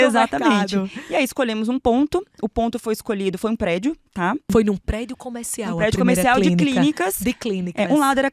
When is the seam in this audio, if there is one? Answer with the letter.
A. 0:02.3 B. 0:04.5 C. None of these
B